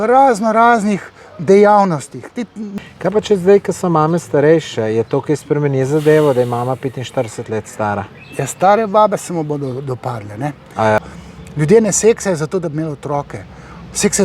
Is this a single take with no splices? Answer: no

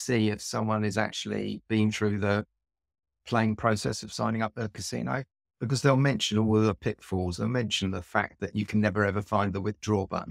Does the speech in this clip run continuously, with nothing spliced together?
yes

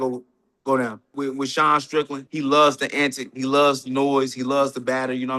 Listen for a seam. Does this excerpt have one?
yes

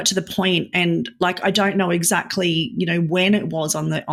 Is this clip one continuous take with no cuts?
yes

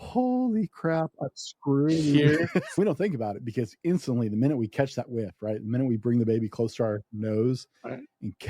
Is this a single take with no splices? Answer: no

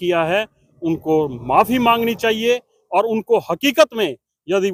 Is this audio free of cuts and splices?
yes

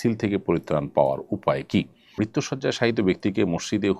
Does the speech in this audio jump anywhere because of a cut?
yes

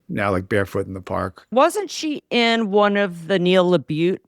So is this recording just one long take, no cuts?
no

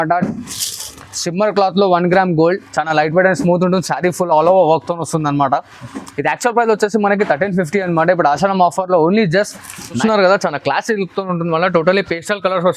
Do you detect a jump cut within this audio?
yes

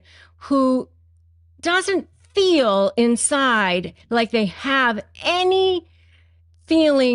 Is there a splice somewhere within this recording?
no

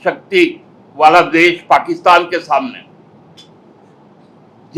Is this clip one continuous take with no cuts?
yes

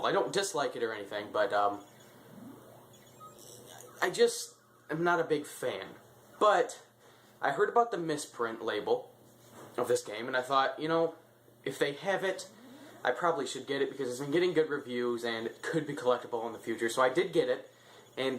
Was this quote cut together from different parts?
yes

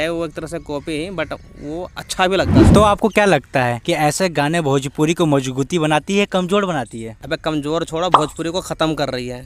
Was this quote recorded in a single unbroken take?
no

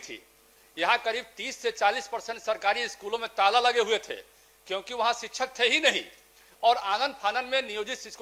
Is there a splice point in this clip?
no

